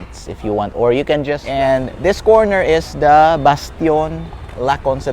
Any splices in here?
yes; 1 cut; at 1.4 s

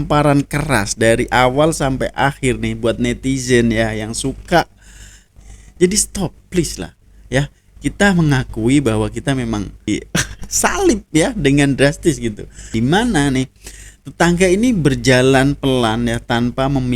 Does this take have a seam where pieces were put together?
yes; 3 cuts; at 5.2 s, 9.9 s, 12.6 s

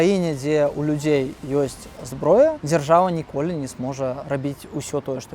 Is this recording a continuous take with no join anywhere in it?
no; 2 cuts; at 2.6 s, 4.2 s

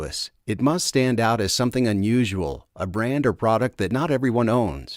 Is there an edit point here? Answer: no; 0 cuts

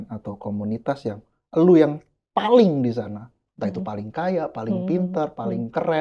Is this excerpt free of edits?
yes; 0 cuts

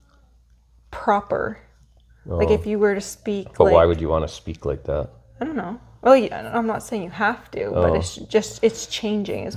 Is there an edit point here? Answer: no; 0 cuts

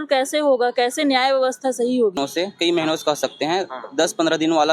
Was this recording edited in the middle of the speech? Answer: yes; 1 cut; at 2.2 s

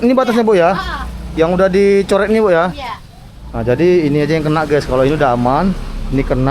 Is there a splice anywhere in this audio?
no; 0 cuts

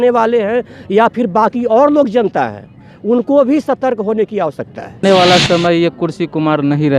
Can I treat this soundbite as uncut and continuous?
no; 1 cut; at 5.0 s

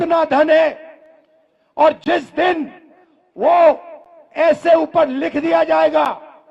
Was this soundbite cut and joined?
no; 0 cuts

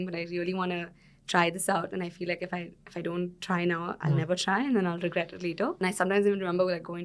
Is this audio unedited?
no; 1 cut; at 5.8 s

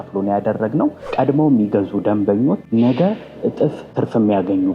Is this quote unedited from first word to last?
no; 3 cuts; at 1.0 s, 2.6 s, 3.8 s

